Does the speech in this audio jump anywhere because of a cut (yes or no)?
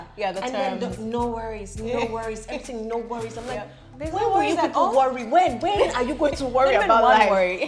no